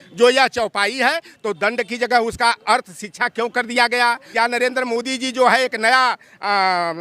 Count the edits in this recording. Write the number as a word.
one